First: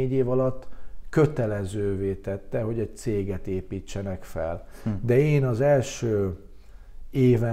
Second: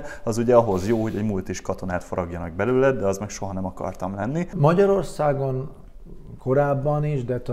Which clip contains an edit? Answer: second; 1 cut; at 4.5 s

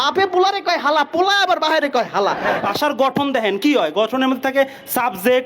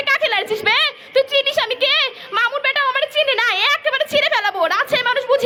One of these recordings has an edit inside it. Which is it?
first; 1 cut; at 2.6 s

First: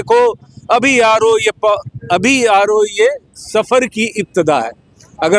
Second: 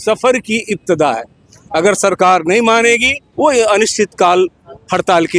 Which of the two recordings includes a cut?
second; 1 cut; at 3.2 s

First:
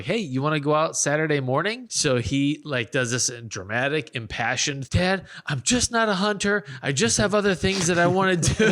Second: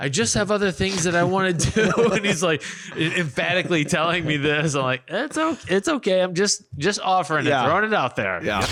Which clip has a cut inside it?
first; 2 cuts; at 1.9 s, 4.8 s

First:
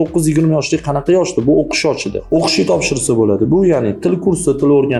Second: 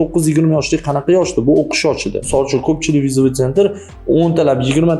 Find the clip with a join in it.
second; 1 cut; at 2.2 s

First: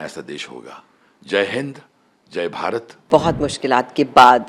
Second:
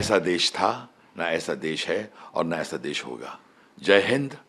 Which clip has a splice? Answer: first; 1 cut; at 3.1 s

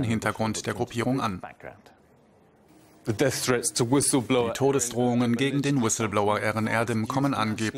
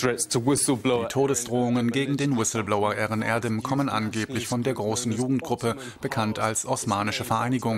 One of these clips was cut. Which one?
first; 1 cut; at 0.9 s

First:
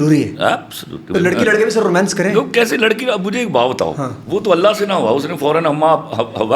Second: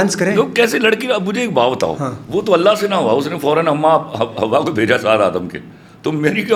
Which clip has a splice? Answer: first; 1 cut; at 1.0 s

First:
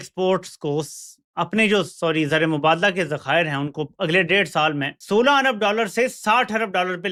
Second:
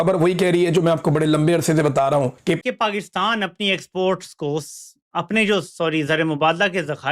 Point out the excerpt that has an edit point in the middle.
second; 1 cut; at 2.6 s

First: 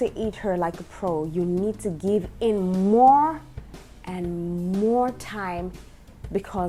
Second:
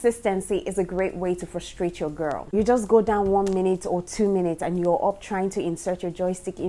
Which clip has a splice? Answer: second; 1 cut; at 2.4 s

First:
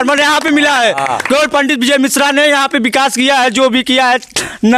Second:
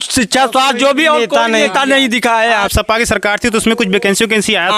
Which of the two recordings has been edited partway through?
second; 1 cut; at 2.7 s

